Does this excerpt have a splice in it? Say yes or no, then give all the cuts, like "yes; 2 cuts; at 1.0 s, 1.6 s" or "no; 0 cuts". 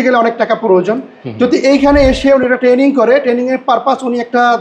no; 0 cuts